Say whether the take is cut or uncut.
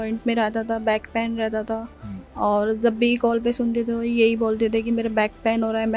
uncut